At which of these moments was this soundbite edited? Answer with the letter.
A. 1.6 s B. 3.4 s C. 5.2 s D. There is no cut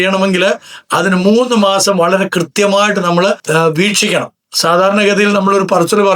B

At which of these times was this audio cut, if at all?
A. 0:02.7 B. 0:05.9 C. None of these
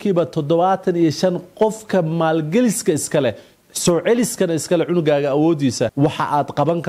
B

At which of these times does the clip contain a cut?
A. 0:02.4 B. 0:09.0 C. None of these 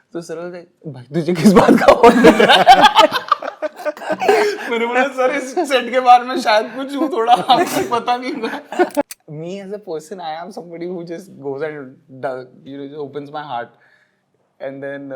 B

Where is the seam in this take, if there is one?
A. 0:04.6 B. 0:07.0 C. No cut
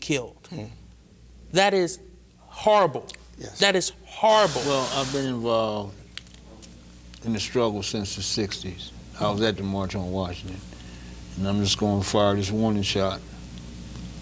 A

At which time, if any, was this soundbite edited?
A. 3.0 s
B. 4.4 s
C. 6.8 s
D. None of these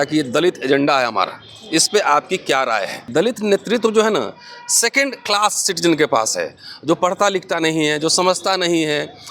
A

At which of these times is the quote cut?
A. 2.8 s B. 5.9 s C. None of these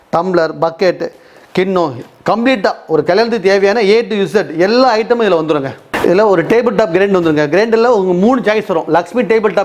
C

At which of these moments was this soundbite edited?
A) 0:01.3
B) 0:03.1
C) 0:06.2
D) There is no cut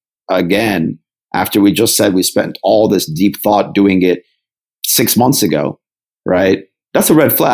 D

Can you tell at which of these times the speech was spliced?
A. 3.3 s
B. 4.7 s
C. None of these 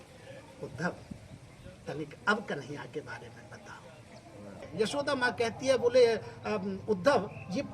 B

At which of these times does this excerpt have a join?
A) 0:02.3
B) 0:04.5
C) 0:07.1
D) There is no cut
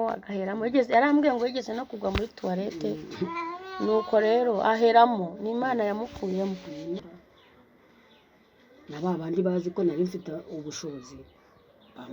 C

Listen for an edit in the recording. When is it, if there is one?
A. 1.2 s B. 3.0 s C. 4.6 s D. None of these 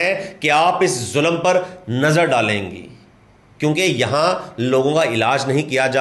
D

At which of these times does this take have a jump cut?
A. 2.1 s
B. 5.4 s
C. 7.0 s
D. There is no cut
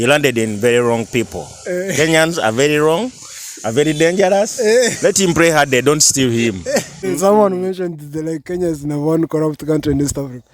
C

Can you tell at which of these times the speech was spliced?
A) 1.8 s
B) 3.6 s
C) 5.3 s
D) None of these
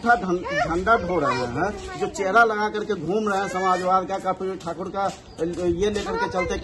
D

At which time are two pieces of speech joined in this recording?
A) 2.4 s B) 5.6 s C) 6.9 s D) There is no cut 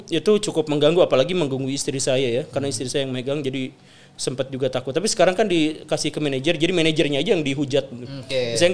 D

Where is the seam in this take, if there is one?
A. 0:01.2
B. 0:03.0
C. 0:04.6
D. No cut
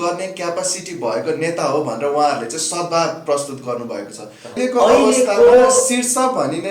C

